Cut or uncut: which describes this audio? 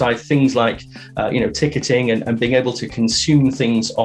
uncut